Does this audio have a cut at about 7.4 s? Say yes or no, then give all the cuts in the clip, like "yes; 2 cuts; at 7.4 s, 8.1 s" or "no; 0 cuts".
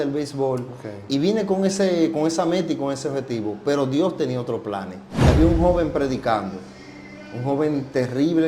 no; 1 cut; at 5.3 s